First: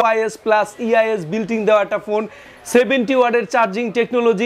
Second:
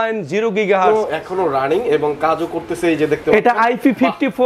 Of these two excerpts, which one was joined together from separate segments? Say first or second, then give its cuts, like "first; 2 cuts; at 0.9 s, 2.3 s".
second; 1 cut; at 1.1 s